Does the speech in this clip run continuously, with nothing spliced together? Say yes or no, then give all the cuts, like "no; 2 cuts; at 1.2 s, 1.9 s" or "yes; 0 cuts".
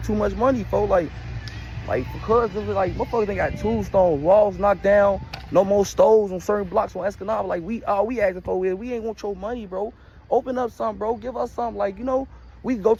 yes; 0 cuts